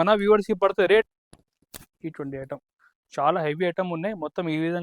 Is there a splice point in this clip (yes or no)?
yes